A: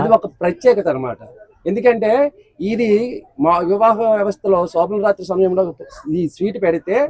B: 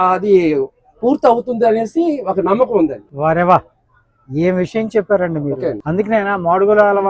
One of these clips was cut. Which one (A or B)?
B